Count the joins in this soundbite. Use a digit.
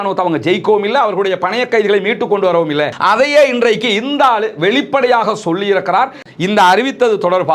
1